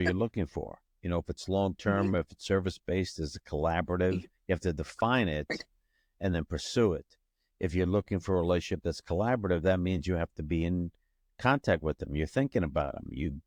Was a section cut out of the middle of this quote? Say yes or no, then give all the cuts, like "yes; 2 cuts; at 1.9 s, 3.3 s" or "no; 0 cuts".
no; 0 cuts